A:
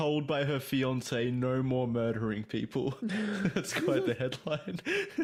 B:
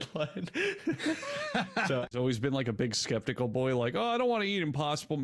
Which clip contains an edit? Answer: B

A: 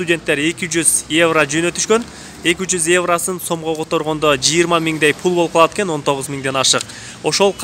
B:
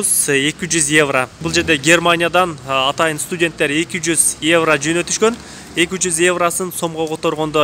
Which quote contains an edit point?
B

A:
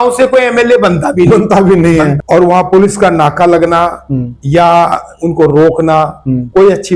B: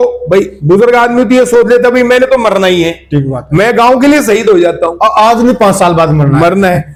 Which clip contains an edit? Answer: A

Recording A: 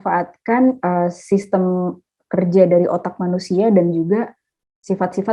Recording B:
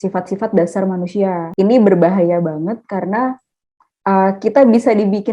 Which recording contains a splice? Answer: B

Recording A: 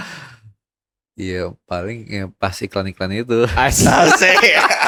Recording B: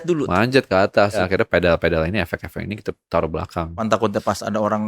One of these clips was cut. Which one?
B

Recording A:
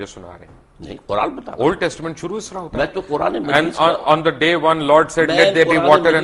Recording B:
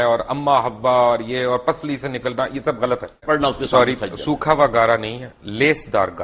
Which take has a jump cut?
B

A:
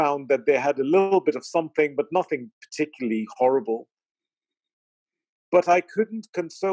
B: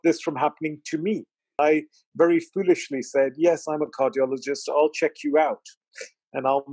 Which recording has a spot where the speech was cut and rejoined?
B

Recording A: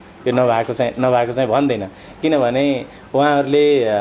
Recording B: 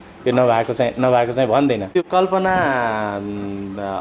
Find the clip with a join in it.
B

